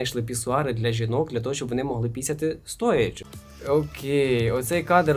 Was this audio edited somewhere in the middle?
yes; 1 cut; at 3.3 s

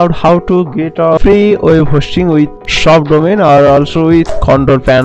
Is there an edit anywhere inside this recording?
yes; 3 cuts; at 1.2 s, 2.6 s, 4.3 s

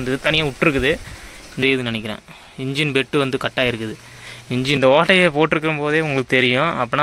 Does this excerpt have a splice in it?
yes; 2 cuts; at 1.6 s, 4.8 s

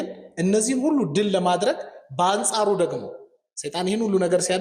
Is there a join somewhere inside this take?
no; 0 cuts

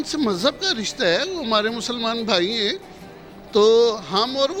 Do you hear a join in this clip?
no; 0 cuts

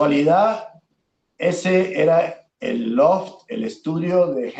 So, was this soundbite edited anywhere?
no; 0 cuts

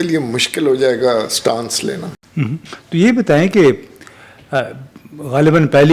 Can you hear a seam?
no; 0 cuts

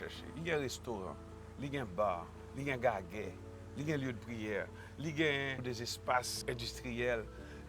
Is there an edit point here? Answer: yes; 2 cuts; at 5.6 s, 6.4 s

